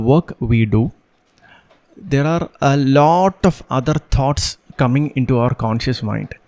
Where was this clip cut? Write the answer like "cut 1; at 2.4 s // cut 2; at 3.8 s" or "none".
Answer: none

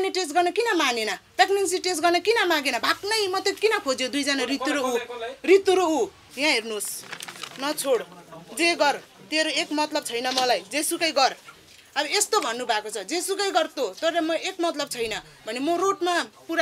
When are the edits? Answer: cut 1; at 6.2 s

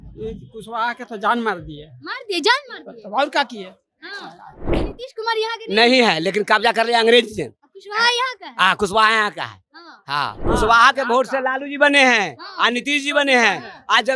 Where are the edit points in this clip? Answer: cut 1; at 4.7 s // cut 2; at 10.5 s

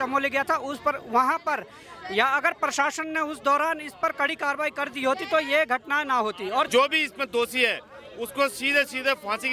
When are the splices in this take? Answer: cut 1; at 6.7 s

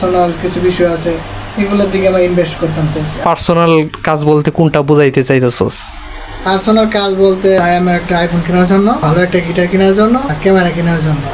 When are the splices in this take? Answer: cut 1; at 3.2 s // cut 2; at 7.6 s // cut 3; at 9.0 s // cut 4; at 10.4 s

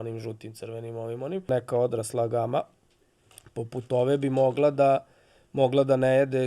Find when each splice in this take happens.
cut 1; at 1.5 s

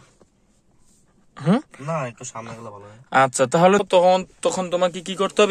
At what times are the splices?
cut 1; at 3.8 s

